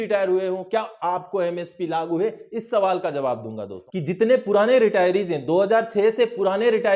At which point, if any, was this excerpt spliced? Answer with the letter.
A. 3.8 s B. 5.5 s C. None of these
A